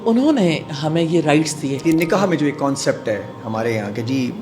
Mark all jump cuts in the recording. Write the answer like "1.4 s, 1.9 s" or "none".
1.8 s